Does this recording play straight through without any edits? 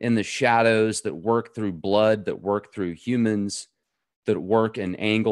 yes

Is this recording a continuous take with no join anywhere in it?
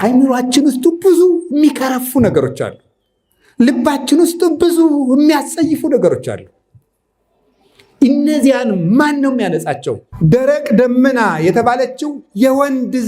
no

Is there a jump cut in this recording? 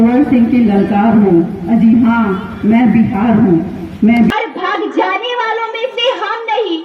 yes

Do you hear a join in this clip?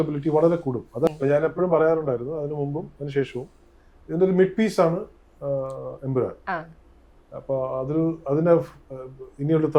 yes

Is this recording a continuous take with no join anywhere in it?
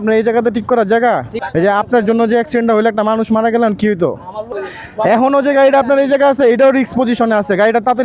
no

